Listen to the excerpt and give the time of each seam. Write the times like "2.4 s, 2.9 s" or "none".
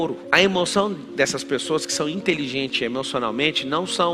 none

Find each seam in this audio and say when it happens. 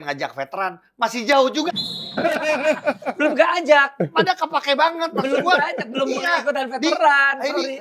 none

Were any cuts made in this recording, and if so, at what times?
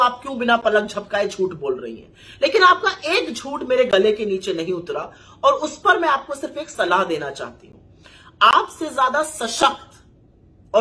none

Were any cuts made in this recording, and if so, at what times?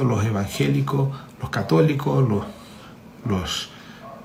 none

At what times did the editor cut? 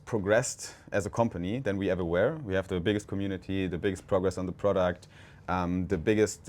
none

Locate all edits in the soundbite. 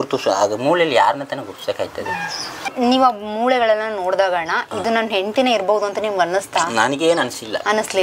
2.7 s

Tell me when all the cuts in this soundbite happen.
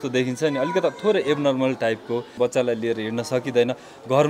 2.3 s

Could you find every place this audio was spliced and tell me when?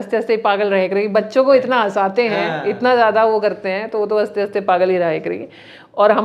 none

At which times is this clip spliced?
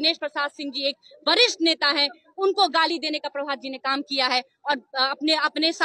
none

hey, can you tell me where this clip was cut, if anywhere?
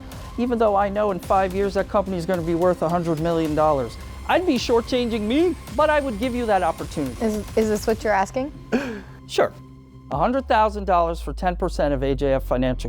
5.6 s, 7.1 s

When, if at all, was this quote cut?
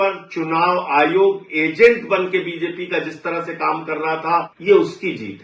4.5 s

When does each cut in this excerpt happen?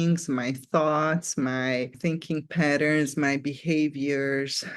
1.9 s

